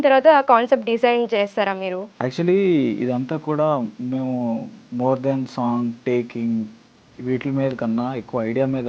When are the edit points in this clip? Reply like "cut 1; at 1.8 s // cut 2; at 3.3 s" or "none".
cut 1; at 2.1 s // cut 2; at 4.8 s